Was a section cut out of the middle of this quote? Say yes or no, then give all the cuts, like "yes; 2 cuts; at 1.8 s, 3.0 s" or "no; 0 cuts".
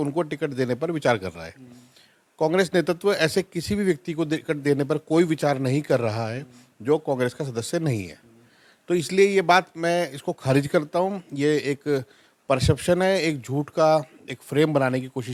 no; 0 cuts